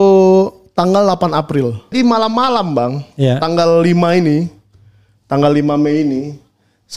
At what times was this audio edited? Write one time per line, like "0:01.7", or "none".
0:01.9